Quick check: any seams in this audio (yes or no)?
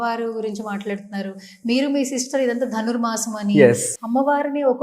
yes